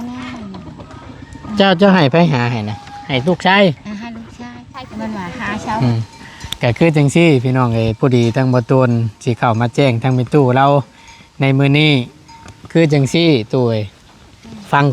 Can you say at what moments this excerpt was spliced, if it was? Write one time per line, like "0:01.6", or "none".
0:05.8